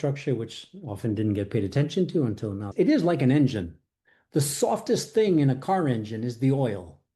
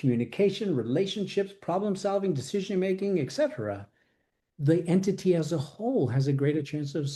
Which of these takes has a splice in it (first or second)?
first